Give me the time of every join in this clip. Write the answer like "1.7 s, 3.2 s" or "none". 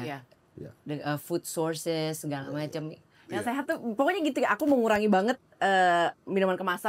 3.1 s